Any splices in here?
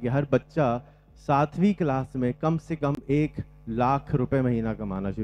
no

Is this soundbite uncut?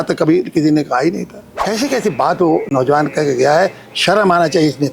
no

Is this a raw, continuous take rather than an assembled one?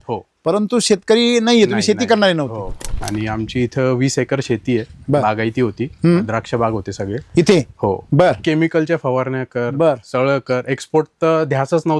no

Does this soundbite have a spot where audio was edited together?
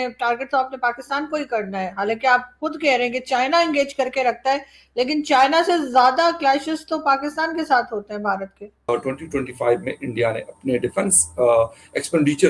yes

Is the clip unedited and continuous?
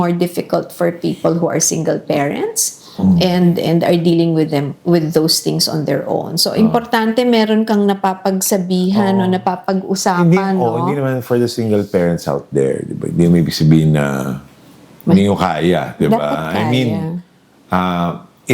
yes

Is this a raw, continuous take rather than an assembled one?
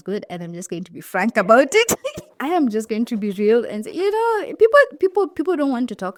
yes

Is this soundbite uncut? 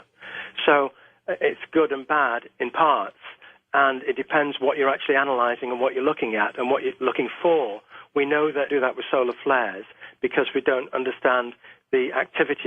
no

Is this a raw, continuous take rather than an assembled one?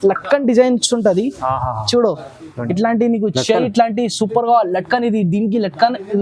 yes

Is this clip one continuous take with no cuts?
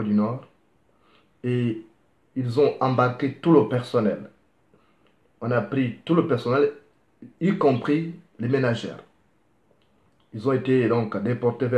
no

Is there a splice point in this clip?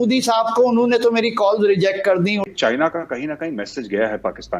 yes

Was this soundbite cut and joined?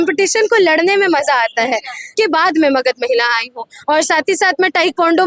yes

